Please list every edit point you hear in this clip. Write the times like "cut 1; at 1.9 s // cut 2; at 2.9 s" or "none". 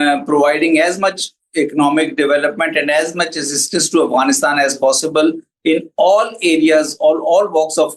none